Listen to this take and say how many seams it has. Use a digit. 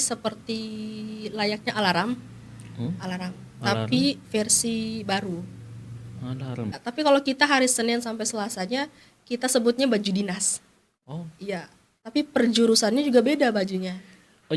1